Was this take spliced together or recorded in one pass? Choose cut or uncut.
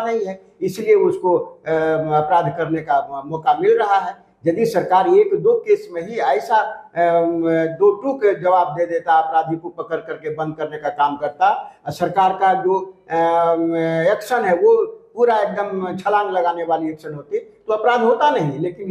uncut